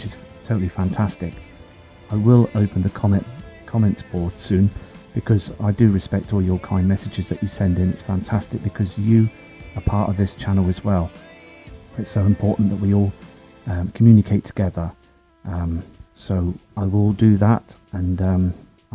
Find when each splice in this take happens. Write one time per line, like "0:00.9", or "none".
0:05.9

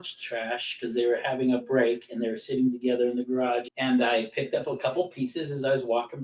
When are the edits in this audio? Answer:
0:03.6

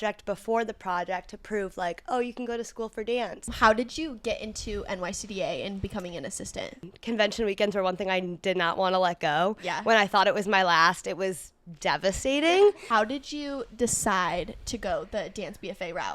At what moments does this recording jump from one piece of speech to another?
0:03.5
0:06.9
0:12.8

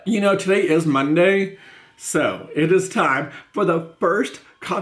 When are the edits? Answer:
none

